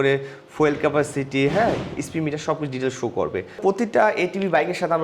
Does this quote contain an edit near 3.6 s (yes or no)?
yes